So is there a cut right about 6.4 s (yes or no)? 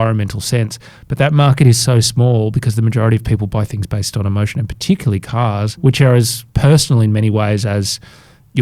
yes